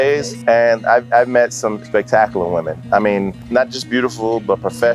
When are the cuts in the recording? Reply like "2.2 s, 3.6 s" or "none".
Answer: 3.4 s